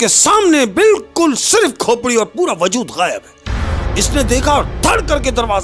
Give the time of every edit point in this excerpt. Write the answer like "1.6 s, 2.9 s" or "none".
none